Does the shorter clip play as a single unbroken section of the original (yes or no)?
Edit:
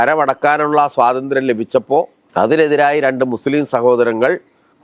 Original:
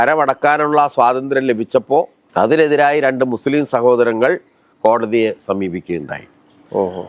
yes